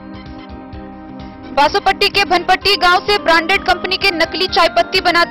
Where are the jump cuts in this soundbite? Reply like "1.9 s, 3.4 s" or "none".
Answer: none